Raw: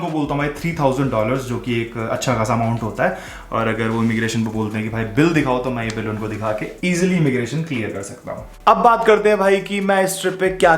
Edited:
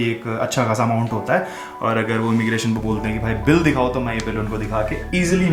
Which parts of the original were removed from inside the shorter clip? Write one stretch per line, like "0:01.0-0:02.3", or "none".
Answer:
none